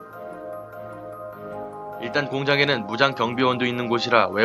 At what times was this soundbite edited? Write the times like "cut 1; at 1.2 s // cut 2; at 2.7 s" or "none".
none